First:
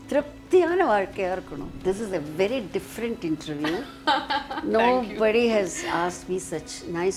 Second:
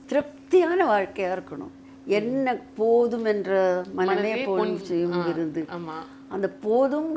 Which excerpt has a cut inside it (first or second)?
first